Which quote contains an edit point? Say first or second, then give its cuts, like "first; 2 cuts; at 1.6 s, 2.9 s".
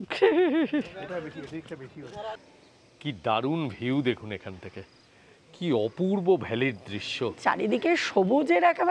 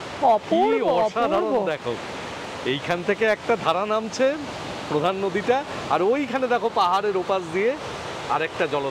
first; 2 cuts; at 2.3 s, 7.4 s